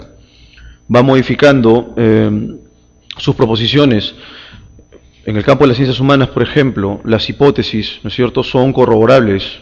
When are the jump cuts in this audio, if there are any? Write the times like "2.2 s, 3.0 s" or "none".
6.7 s